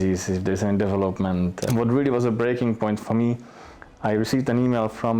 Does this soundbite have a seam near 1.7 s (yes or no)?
yes